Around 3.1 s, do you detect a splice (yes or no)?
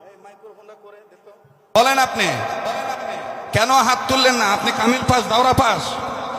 no